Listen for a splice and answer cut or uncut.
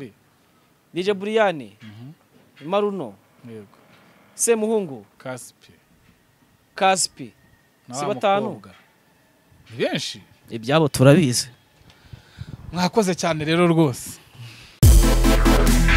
uncut